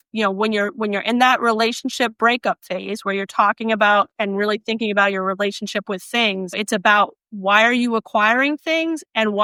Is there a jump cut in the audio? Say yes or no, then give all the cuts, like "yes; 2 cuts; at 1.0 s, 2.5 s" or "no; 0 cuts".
no; 0 cuts